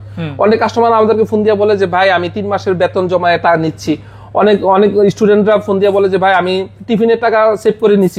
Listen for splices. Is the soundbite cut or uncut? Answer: uncut